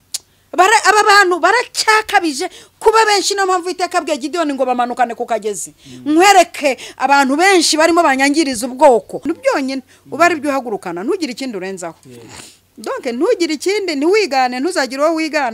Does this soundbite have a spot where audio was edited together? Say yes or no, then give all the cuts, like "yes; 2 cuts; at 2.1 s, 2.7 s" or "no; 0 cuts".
yes; 1 cut; at 9.3 s